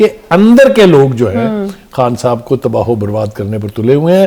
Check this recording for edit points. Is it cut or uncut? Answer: uncut